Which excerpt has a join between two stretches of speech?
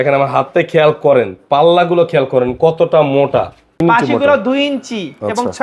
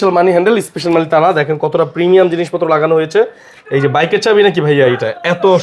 first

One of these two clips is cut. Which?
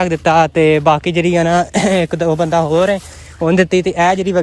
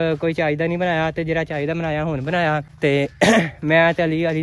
second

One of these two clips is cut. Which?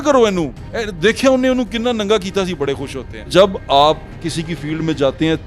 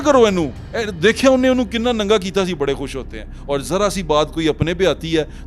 first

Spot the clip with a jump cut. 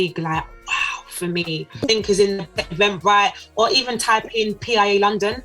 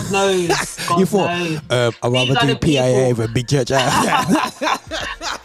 first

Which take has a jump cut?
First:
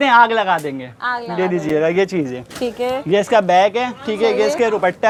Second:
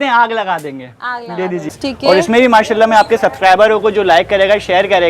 second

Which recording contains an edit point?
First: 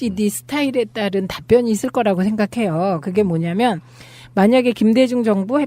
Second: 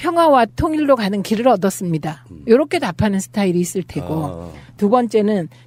first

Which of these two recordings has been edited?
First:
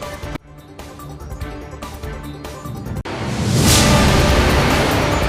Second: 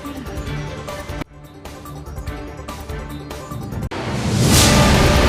first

